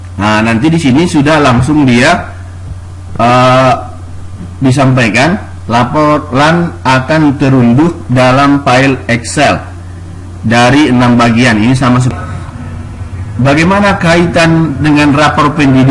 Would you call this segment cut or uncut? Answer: cut